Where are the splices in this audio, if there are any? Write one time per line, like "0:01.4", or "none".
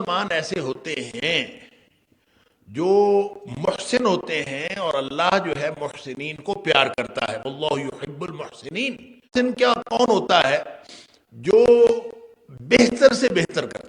0:09.3